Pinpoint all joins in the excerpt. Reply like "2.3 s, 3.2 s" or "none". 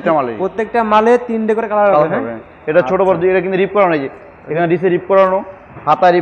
none